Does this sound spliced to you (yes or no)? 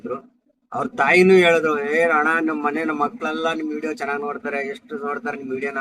no